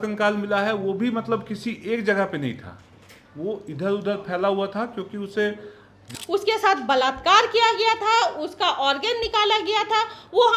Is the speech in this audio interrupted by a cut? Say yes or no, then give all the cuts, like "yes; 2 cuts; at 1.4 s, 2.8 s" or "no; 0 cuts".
yes; 1 cut; at 6.1 s